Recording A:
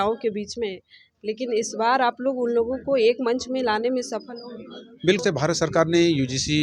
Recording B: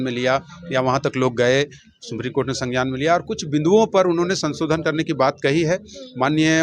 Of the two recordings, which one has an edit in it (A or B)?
A